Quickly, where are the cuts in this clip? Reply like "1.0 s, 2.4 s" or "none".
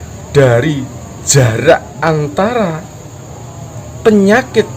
none